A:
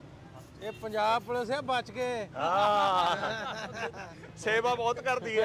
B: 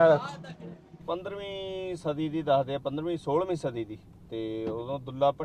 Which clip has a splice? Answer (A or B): B